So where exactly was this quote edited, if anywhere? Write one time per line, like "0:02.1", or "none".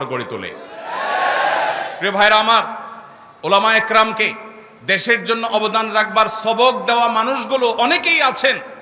none